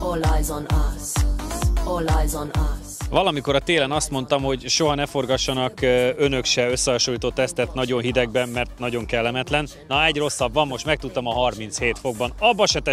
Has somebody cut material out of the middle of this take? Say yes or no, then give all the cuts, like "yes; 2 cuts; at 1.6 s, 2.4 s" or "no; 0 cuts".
no; 0 cuts